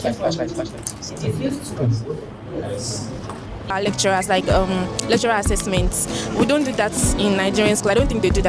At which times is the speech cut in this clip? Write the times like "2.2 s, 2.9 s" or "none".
3.7 s